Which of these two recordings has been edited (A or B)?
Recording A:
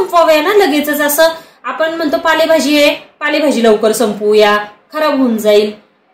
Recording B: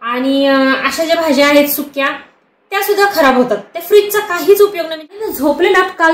B